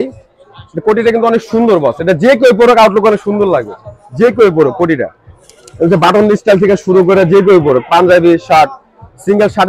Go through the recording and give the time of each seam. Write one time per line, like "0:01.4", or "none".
none